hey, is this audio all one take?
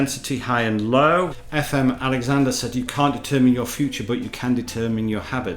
no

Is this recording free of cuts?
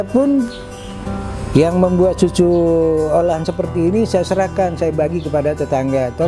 yes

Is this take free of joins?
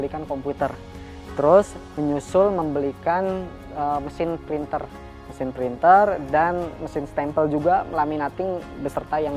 yes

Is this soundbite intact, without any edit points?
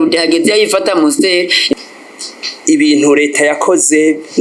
no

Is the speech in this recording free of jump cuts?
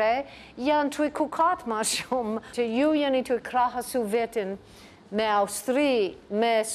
no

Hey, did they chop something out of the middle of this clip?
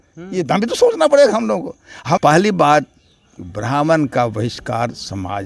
yes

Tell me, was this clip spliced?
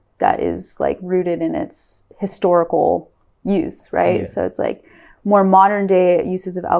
no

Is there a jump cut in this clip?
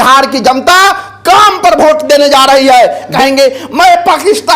yes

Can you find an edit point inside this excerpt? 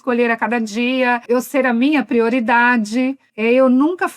yes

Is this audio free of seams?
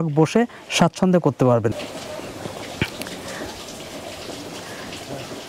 no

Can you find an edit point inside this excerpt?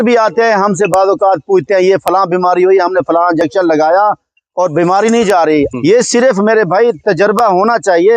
yes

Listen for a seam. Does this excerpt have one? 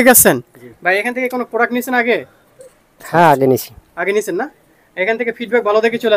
no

